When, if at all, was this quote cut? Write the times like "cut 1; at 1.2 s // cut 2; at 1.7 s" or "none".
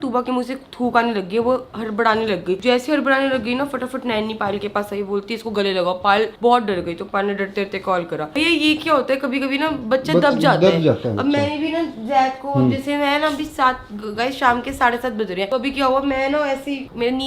none